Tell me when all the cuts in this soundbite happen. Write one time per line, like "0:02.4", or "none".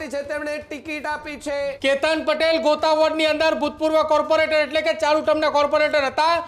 0:01.7